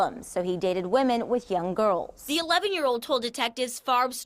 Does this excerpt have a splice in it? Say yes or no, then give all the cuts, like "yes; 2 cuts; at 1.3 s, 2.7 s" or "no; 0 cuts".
yes; 1 cut; at 2.2 s